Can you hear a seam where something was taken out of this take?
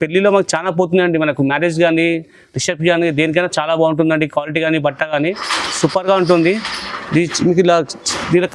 no; 0 cuts

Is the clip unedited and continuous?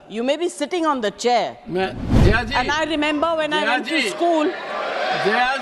yes; 0 cuts

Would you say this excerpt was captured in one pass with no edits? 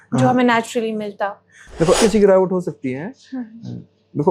no; 1 cut; at 2.0 s

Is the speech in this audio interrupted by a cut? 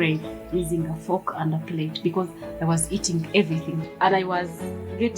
yes; 1 cut; at 3.8 s

